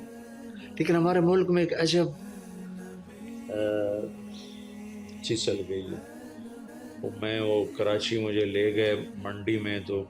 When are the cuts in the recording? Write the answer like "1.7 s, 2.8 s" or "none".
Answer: 6.7 s